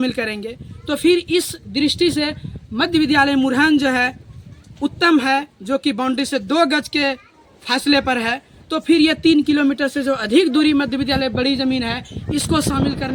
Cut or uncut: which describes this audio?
uncut